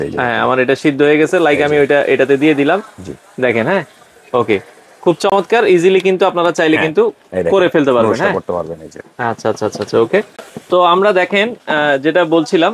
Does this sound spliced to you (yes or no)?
no